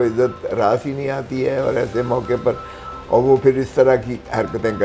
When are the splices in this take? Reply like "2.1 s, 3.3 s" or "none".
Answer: none